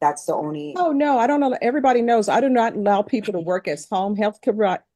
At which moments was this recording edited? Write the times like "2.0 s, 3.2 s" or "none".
none